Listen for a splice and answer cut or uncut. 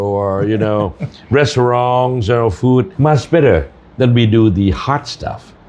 cut